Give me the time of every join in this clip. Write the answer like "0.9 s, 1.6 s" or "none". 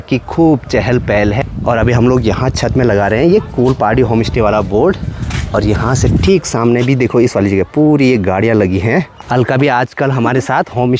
1.4 s, 9.1 s